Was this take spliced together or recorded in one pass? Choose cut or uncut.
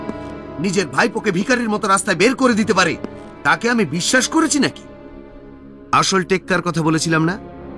uncut